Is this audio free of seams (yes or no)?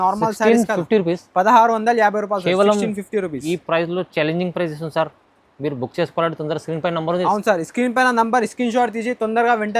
yes